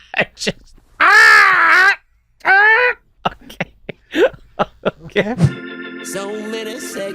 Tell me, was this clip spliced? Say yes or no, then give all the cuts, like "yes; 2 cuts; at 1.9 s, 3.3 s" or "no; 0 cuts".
yes; 2 cuts; at 3.1 s, 5.5 s